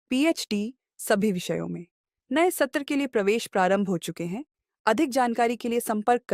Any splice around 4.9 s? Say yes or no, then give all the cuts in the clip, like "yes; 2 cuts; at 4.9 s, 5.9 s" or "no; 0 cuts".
no; 0 cuts